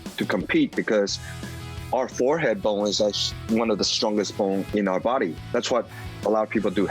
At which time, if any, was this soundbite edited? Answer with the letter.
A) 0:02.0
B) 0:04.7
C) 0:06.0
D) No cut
B